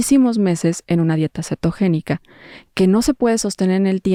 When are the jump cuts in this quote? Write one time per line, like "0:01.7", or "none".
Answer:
none